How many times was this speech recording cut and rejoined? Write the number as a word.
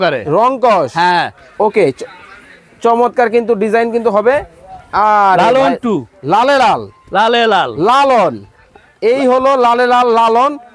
one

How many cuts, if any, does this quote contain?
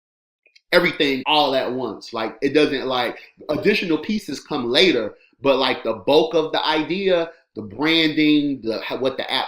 one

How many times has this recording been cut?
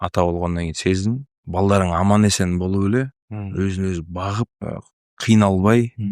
two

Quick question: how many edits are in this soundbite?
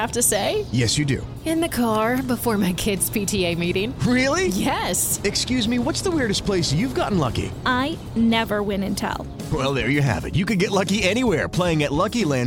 zero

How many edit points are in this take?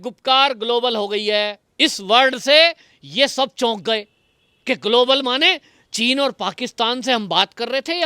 one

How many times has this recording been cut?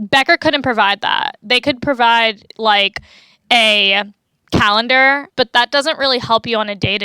two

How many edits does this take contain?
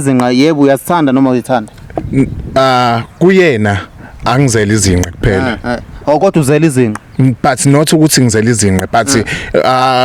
zero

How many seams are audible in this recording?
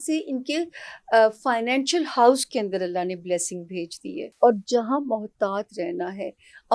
one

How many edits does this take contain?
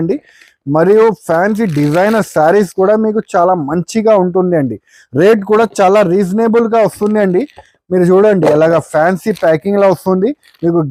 zero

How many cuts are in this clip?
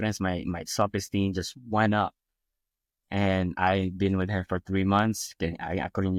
zero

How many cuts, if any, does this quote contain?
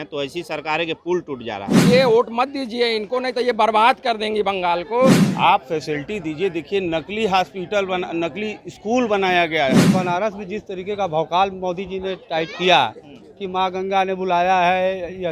three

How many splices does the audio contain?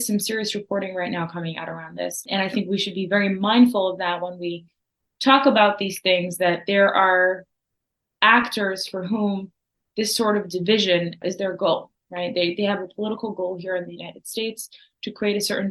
one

